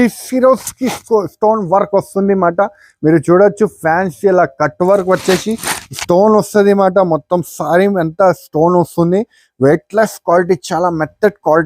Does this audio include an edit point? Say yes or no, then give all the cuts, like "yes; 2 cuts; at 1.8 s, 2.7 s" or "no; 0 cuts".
no; 0 cuts